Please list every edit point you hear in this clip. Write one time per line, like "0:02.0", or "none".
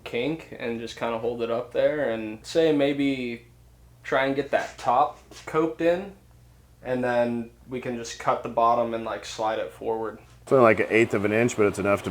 0:10.4